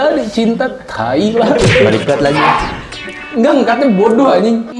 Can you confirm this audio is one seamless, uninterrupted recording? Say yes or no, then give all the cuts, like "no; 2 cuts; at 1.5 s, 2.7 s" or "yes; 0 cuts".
yes; 0 cuts